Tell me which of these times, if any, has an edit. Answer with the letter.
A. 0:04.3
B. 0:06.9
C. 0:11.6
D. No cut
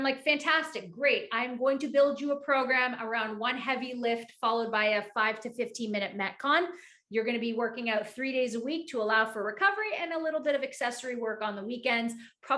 D